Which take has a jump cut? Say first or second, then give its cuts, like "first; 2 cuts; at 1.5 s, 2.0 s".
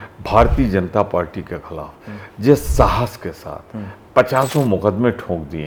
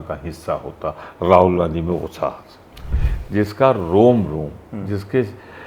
second; 1 cut; at 3.0 s